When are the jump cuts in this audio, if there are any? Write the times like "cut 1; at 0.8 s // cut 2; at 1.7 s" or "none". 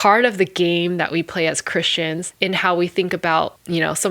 cut 1; at 2.3 s